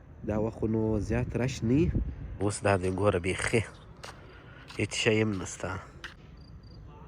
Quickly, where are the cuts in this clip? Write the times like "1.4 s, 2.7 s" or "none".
2.4 s, 6.2 s